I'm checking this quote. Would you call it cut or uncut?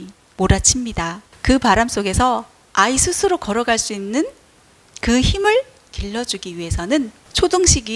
uncut